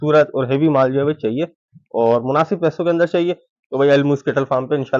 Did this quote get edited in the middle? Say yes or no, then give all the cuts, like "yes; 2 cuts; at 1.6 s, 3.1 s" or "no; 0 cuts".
no; 0 cuts